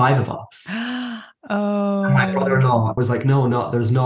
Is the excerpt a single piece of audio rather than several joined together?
no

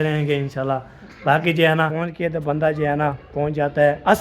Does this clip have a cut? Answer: yes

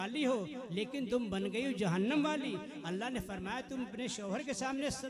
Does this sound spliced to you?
no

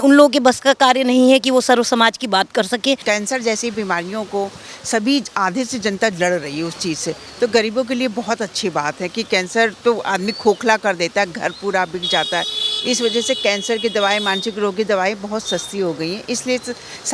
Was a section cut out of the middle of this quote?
yes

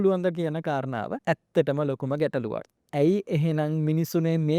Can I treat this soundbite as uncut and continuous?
no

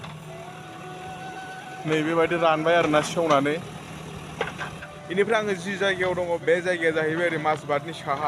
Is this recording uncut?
no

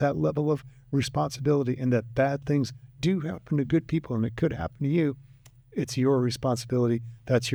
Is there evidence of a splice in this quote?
no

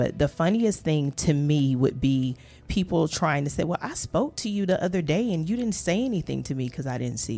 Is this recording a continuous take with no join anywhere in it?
yes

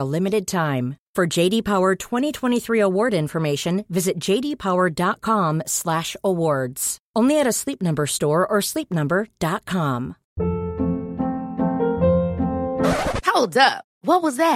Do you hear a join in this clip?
yes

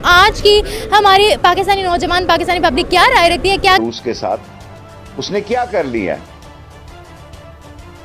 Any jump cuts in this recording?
yes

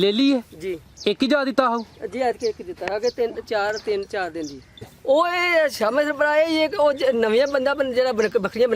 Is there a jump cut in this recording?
yes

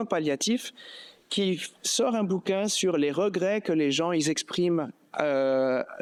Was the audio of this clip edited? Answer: no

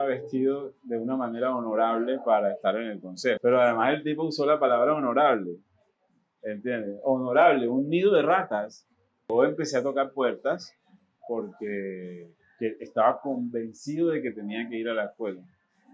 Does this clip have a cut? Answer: yes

